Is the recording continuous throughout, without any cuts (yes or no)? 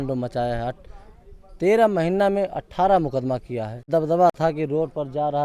no